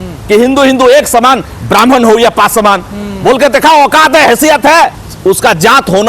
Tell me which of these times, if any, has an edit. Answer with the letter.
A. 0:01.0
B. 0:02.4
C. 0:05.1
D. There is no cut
C